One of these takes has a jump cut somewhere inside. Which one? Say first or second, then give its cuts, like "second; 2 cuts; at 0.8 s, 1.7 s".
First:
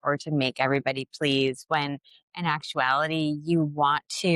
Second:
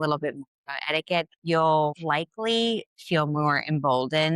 second; 2 cuts; at 1.3 s, 2.0 s